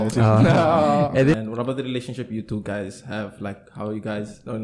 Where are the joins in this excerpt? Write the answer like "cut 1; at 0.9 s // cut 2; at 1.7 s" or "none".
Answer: cut 1; at 1.3 s